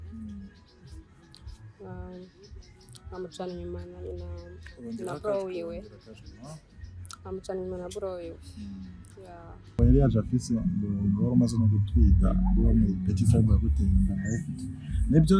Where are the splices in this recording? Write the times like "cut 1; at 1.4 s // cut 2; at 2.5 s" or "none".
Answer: cut 1; at 9.8 s